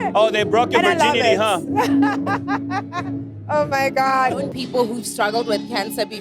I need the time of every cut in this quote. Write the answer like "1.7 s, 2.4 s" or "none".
4.5 s